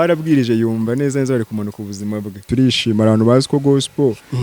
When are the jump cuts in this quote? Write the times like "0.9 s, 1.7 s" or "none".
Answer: 2.5 s